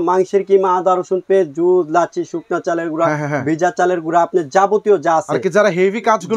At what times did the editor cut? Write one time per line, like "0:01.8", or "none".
none

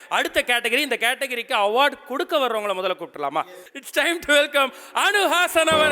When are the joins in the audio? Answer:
0:03.6

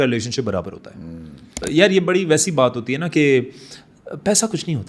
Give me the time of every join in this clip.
0:01.5

